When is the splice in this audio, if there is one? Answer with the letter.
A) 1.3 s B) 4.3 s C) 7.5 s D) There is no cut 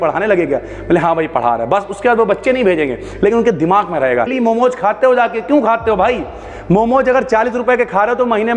B